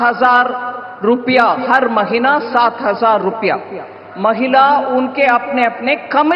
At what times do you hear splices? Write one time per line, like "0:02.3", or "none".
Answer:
0:04.0